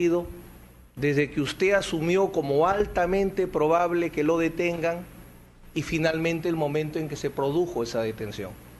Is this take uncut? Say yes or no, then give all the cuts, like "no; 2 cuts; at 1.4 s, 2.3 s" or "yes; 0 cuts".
no; 1 cut; at 7.6 s